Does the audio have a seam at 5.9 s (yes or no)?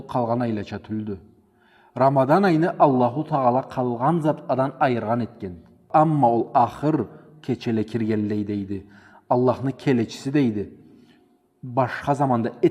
yes